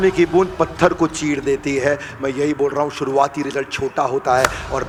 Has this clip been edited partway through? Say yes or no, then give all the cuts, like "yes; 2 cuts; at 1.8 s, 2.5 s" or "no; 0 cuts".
no; 0 cuts